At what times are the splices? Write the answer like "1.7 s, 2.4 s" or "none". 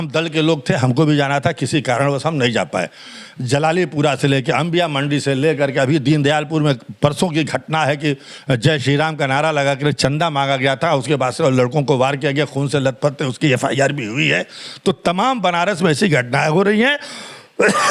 none